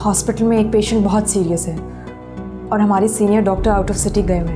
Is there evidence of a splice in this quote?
no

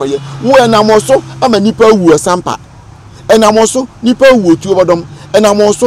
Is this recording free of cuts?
yes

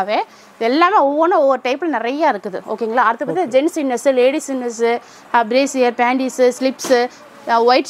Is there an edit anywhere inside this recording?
no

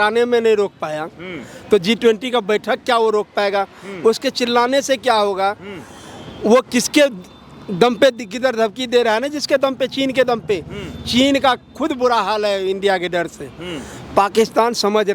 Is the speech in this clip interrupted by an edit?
no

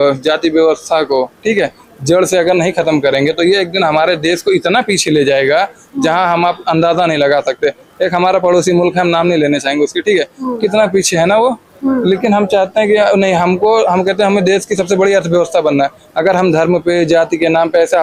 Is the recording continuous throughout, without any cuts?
yes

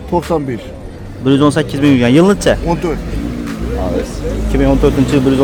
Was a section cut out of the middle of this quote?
no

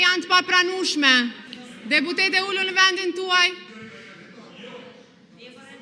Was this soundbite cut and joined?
no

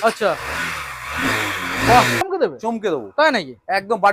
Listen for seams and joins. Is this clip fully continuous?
no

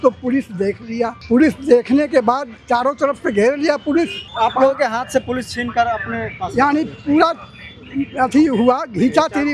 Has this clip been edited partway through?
yes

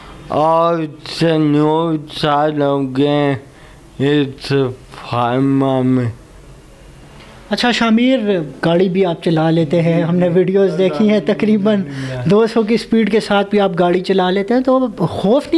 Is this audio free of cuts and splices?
yes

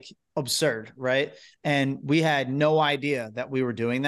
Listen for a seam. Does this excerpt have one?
no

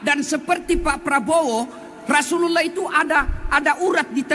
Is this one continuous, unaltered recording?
yes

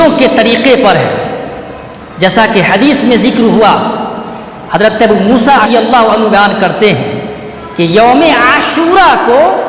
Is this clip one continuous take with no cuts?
no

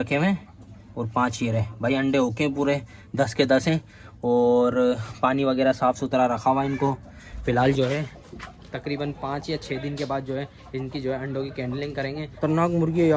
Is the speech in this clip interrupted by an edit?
no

